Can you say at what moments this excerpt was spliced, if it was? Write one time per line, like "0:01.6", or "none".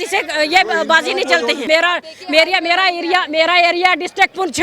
0:01.7